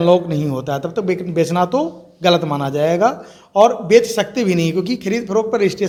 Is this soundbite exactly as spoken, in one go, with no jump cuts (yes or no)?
yes